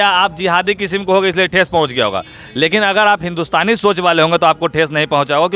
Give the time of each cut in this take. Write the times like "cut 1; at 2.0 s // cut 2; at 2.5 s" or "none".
none